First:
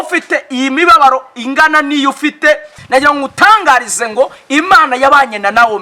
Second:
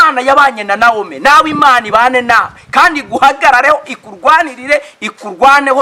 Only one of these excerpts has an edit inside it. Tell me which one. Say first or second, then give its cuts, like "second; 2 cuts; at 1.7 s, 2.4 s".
first; 1 cut; at 2.7 s